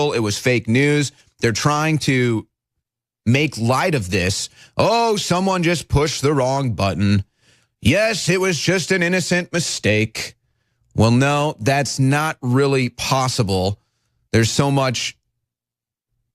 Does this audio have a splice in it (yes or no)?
yes